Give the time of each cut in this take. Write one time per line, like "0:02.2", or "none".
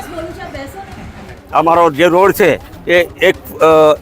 0:01.4